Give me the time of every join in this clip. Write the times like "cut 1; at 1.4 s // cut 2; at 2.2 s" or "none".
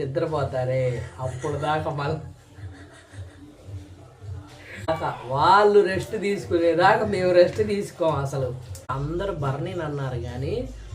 cut 1; at 4.9 s // cut 2; at 8.9 s

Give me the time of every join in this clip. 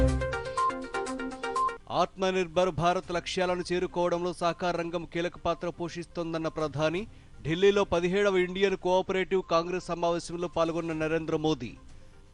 none

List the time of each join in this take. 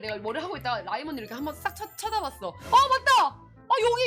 cut 1; at 2.6 s

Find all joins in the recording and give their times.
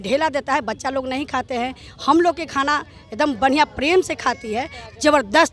none

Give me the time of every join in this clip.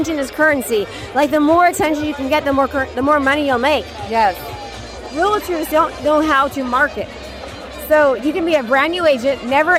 none

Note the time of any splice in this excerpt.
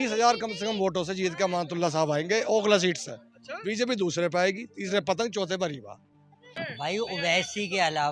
cut 1; at 6.6 s

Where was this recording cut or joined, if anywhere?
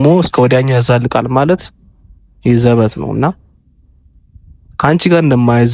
none

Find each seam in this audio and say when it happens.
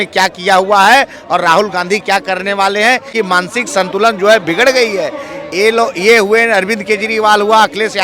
cut 1; at 3.1 s

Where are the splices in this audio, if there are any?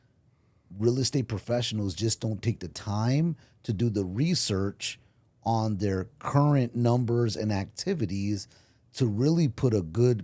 none

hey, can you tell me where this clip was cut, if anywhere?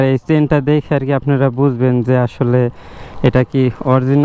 none

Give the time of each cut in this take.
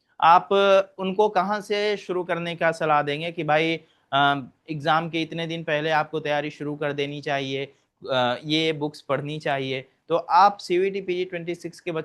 none

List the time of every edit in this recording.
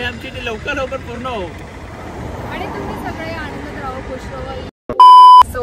cut 1; at 4.7 s

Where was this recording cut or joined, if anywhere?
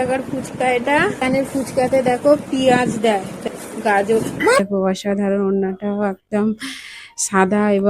cut 1; at 1.2 s // cut 2; at 3.3 s // cut 3; at 4.6 s

